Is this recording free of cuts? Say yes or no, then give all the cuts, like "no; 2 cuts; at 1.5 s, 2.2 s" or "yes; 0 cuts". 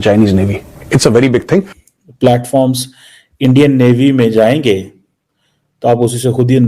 no; 1 cut; at 1.8 s